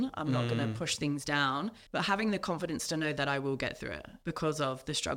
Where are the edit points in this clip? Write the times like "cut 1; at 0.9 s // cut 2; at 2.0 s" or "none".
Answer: cut 1; at 1.8 s // cut 2; at 4.1 s